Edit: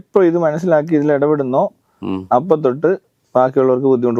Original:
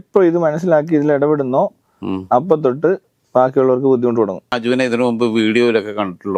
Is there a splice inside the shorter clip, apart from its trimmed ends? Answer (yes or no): no